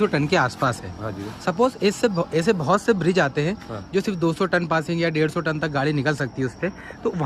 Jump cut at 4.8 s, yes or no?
no